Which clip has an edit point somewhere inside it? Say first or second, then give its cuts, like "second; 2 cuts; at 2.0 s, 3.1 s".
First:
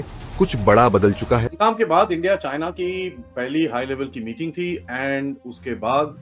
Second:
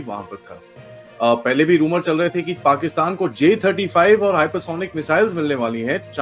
first; 1 cut; at 1.5 s